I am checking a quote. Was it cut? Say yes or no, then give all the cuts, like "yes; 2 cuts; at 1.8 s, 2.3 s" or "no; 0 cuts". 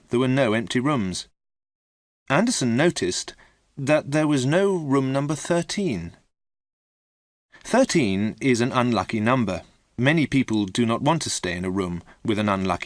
no; 0 cuts